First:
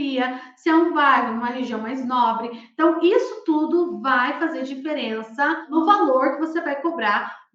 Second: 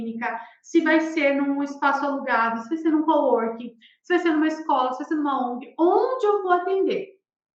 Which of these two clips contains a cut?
first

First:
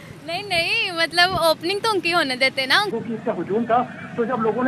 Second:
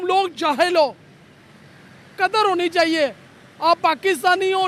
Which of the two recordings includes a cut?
first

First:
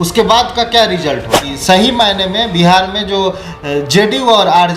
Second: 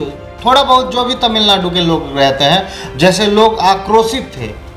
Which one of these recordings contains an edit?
first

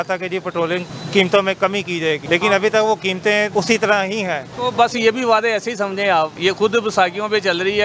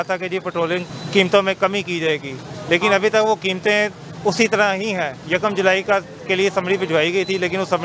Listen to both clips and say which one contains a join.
first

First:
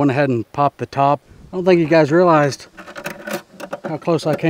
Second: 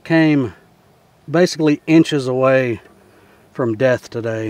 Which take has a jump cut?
first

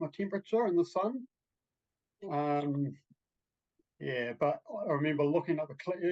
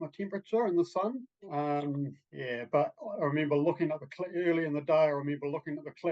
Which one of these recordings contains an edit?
second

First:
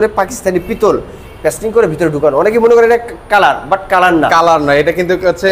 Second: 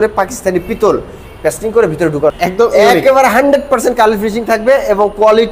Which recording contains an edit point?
second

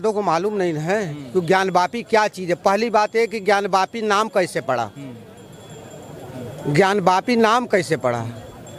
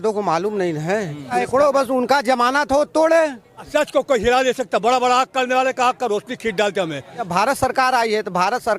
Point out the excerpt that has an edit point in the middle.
second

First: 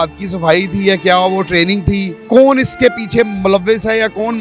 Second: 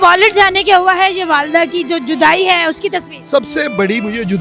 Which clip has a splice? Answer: first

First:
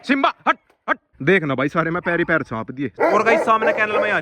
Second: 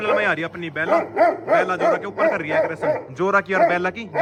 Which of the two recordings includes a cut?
first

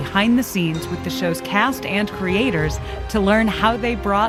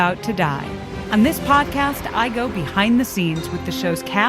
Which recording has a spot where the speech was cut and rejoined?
second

